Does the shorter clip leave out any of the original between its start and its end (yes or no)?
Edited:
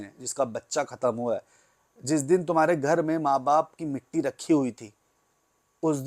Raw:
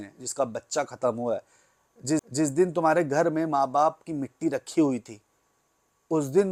yes